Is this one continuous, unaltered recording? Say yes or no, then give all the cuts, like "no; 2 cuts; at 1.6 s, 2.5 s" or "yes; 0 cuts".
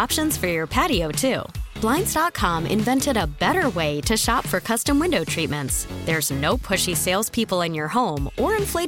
yes; 0 cuts